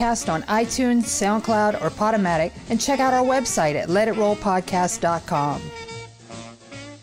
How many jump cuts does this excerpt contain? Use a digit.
1